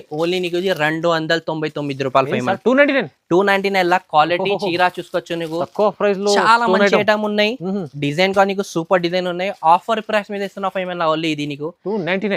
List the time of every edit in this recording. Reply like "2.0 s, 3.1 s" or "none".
none

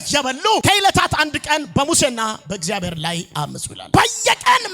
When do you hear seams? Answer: 3.8 s

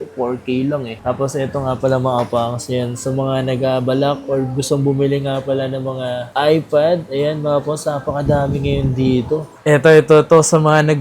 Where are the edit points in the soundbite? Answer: 0.9 s, 9.5 s

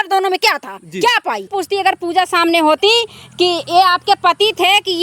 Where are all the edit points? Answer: 1.6 s

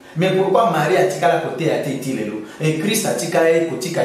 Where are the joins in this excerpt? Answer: none

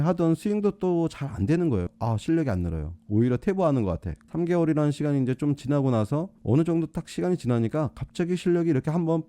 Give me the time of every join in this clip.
1.9 s

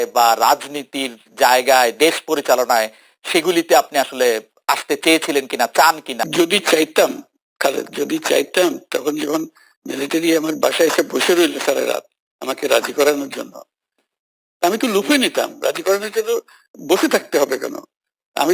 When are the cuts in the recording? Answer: 6.2 s

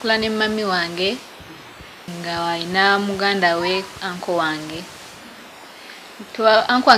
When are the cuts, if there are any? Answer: 2.1 s

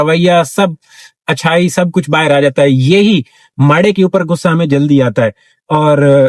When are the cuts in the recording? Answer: none

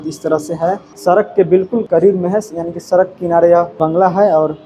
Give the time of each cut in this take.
0.9 s, 1.8 s, 3.7 s

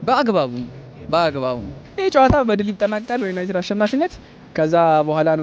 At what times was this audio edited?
1.8 s

